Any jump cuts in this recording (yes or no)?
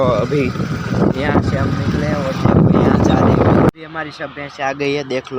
yes